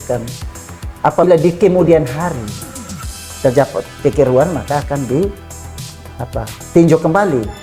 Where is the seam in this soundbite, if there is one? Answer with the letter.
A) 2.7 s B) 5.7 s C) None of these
C